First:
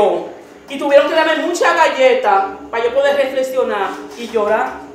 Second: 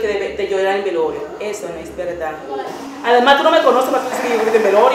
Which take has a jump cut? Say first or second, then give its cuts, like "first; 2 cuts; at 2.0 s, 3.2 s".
second; 1 cut; at 2.8 s